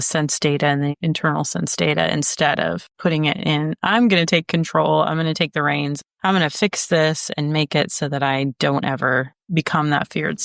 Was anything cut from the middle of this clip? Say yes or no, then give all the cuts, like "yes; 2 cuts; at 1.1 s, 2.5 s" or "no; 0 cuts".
no; 0 cuts